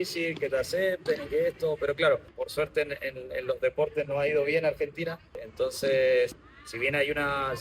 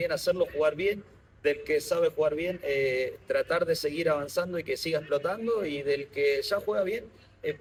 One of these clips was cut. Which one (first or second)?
first